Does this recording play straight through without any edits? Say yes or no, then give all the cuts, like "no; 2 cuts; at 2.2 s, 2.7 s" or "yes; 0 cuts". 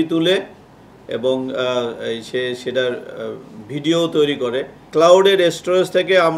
no; 1 cut; at 4.7 s